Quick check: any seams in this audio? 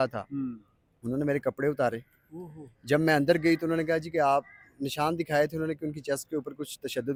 no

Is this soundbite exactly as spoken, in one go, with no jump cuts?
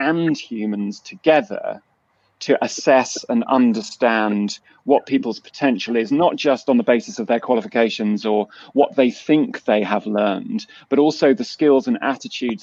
yes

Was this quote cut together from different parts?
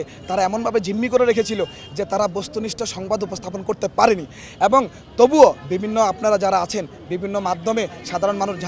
no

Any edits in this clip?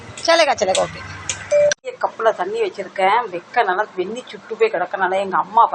yes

